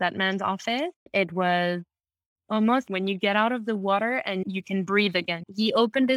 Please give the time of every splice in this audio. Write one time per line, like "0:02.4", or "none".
0:01.1
0:02.9
0:04.4
0:05.4